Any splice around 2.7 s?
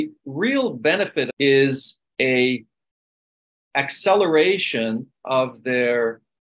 no; 1 cut; at 1.3 s

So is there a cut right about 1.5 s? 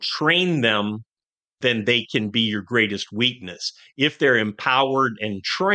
yes; 1 cut; at 1.5 s

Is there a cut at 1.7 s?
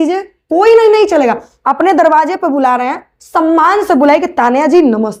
no; 0 cuts

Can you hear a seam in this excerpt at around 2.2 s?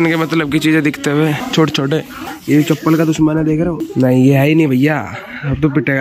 yes; 3 cuts; at 1.4 s, 2.2 s, 3.8 s

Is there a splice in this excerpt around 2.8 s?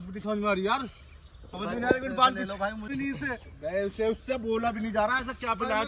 yes; 1 cut; at 2.8 s

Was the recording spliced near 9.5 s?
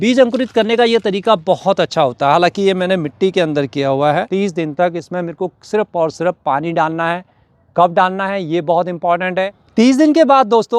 yes; 2 cuts; at 4.3 s, 9.5 s

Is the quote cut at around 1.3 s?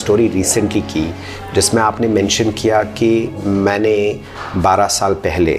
no; 0 cuts

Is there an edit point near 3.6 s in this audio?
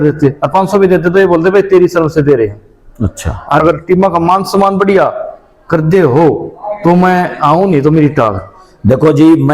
yes; 1 cut; at 3.6 s

